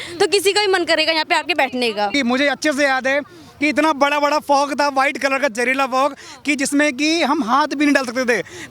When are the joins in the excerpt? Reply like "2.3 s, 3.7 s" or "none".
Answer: 2.1 s